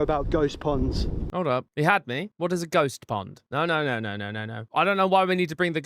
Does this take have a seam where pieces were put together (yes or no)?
yes